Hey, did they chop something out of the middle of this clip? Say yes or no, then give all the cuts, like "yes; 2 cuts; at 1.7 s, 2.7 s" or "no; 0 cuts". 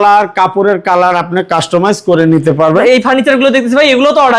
yes; 1 cut; at 2.8 s